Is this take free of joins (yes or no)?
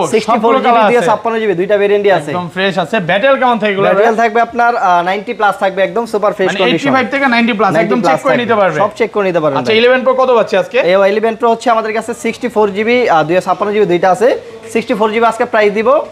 yes